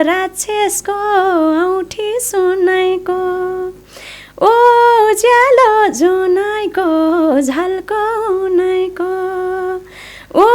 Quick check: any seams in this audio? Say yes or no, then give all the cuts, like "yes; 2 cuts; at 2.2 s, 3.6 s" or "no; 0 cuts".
no; 0 cuts